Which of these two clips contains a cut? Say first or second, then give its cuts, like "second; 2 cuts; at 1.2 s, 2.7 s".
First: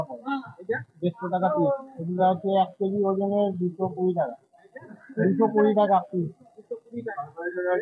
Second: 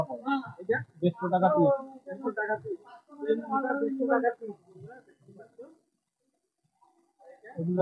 first; 1 cut; at 1.9 s